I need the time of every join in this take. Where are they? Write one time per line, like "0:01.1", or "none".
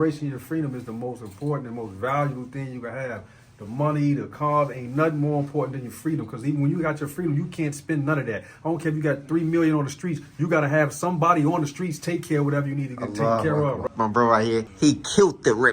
0:13.8
0:14.7